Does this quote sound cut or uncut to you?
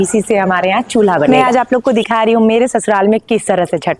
cut